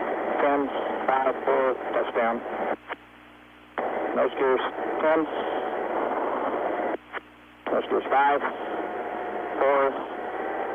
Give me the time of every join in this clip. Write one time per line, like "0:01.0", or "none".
none

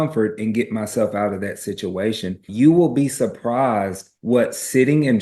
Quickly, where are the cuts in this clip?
0:02.4

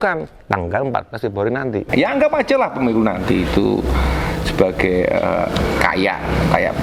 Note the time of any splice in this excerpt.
0:01.9

